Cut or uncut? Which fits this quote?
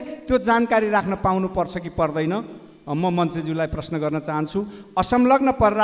uncut